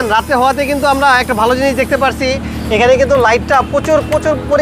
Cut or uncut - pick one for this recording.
uncut